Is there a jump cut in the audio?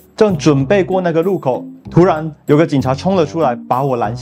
no; 0 cuts

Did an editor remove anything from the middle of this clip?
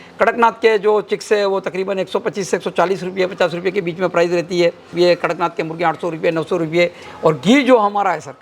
yes; 2 cuts; at 4.9 s, 7.1 s

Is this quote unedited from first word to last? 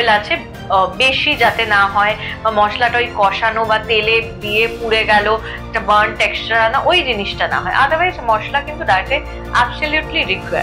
yes; 0 cuts

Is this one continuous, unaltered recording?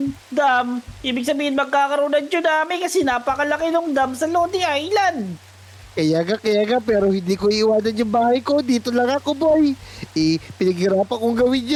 yes; 0 cuts

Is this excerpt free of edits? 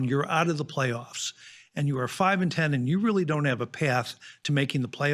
yes; 0 cuts

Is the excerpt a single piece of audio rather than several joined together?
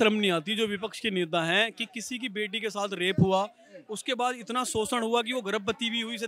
yes; 0 cuts

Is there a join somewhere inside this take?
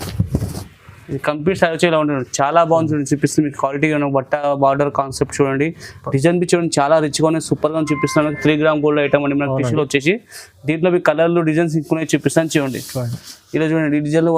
no; 0 cuts

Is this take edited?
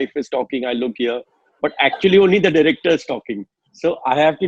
no; 0 cuts

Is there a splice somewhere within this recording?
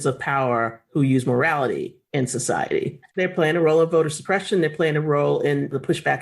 yes; 1 cut; at 3.1 s

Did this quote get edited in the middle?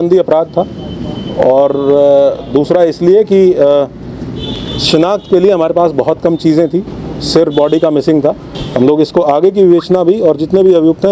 yes; 1 cut; at 8.5 s

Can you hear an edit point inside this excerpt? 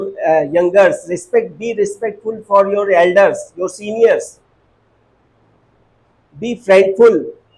no; 0 cuts

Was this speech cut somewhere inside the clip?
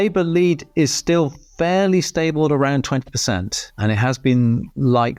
no; 0 cuts

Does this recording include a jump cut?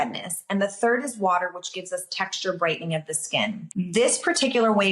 yes; 1 cut; at 3.6 s

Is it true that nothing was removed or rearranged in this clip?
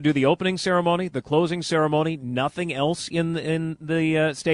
yes; 0 cuts

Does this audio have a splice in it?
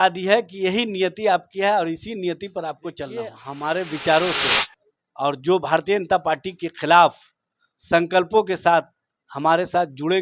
yes; 1 cut; at 3.4 s

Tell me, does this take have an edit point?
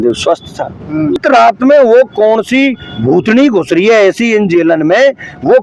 yes; 1 cut; at 1.2 s

